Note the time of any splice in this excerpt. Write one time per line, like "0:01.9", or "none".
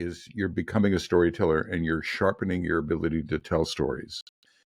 none